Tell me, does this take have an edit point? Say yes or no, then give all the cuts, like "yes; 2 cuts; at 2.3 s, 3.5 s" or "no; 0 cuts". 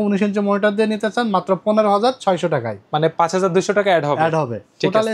no; 0 cuts